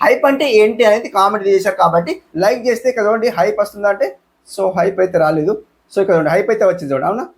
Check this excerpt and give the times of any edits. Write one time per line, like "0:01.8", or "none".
0:02.2